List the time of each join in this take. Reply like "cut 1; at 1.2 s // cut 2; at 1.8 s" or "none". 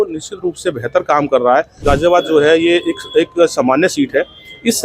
cut 1; at 1.8 s